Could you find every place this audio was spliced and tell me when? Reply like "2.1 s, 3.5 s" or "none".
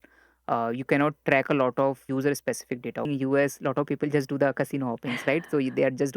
2.1 s, 3.1 s